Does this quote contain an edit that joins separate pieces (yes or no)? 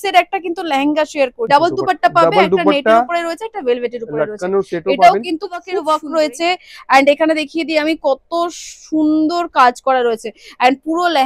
yes